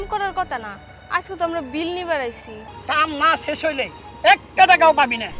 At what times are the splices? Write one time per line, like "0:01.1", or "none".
0:02.6

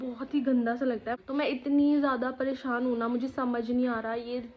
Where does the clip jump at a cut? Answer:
0:01.1

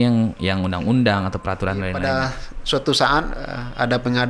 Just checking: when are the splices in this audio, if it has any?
0:02.1

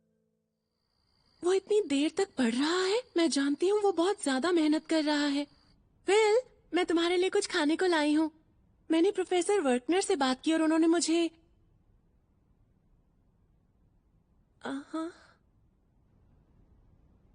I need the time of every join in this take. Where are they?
none

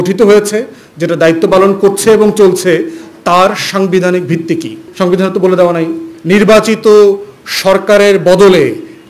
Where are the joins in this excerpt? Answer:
0:04.8
0:06.1

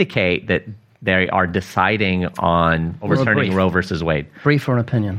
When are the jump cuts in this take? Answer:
0:03.1

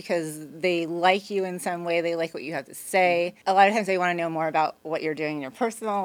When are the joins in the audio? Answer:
0:03.3

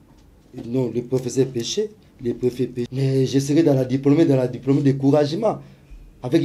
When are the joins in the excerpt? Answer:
0:02.9

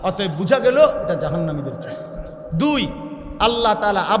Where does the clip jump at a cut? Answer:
none

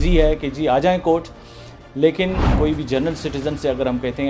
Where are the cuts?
0:02.5

